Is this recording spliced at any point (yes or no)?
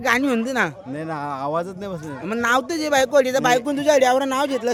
no